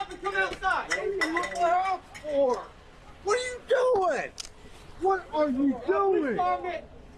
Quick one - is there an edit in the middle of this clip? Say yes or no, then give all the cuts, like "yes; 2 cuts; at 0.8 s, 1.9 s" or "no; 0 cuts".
no; 0 cuts